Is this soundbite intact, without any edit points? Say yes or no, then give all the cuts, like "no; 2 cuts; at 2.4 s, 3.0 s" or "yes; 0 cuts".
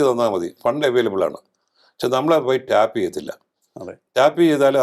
yes; 0 cuts